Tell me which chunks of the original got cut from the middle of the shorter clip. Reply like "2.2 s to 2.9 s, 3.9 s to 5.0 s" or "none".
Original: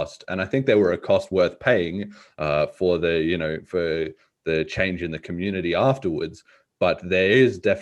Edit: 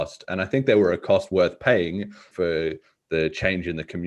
2.3 s to 3.6 s